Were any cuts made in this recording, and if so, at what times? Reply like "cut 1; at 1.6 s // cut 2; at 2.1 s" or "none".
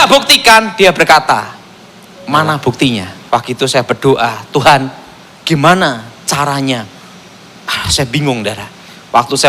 cut 1; at 3.1 s